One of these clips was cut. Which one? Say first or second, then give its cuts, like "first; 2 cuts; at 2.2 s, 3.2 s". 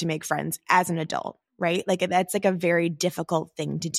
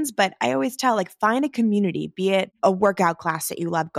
second; 1 cut; at 2.5 s